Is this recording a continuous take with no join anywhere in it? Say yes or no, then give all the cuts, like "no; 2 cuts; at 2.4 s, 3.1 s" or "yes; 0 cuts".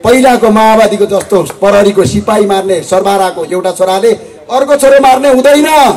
yes; 0 cuts